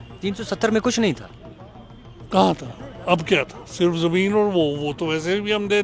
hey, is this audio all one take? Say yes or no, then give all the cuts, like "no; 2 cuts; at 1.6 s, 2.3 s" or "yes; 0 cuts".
yes; 0 cuts